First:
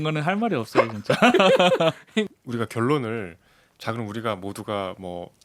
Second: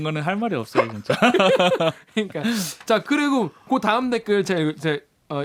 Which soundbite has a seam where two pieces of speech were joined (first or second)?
first